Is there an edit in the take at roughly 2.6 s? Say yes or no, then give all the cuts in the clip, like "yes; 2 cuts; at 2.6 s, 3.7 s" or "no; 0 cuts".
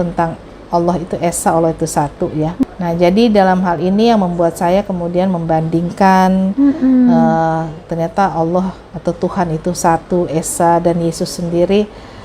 yes; 1 cut; at 2.6 s